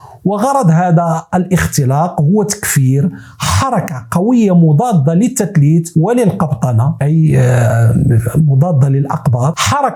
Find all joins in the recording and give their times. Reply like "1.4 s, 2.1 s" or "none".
none